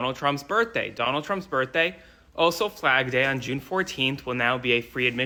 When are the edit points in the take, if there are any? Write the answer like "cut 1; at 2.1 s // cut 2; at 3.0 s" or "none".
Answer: none